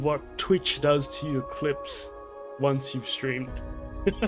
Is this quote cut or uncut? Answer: uncut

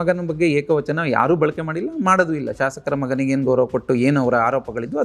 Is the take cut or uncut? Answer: uncut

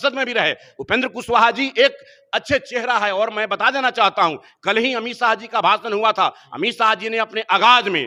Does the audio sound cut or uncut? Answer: uncut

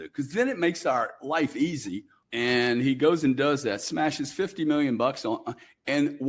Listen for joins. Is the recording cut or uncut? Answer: cut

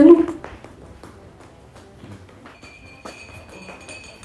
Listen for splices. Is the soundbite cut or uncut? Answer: cut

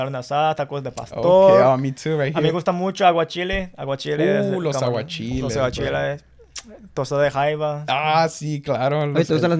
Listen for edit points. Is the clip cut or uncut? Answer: uncut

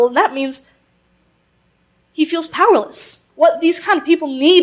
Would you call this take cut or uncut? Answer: cut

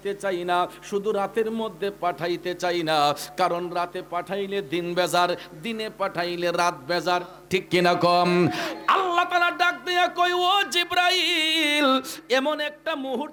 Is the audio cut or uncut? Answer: uncut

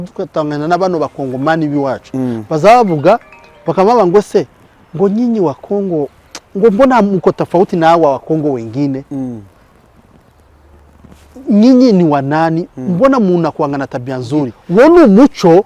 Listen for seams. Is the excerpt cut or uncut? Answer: cut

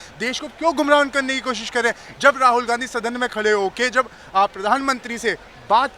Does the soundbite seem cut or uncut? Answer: uncut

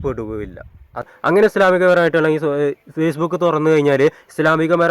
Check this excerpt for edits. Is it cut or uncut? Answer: cut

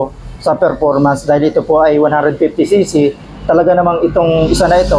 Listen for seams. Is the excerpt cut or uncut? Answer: uncut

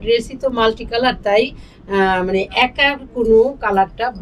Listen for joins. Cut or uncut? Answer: uncut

